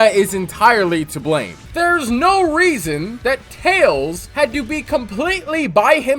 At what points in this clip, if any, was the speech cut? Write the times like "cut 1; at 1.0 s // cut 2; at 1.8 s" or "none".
cut 1; at 1.6 s